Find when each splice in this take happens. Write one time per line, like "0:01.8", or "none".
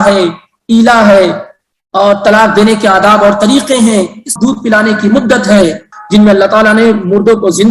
0:04.2
0:05.9